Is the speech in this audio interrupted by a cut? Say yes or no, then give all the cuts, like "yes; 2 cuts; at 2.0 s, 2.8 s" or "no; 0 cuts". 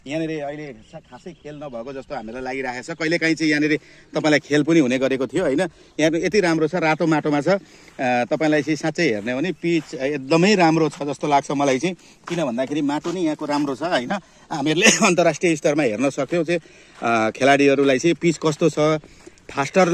no; 0 cuts